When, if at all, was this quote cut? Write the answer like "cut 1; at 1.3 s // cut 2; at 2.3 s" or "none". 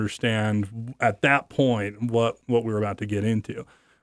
none